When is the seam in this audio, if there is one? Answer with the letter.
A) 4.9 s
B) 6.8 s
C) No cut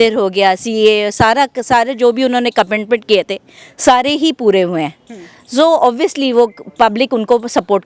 C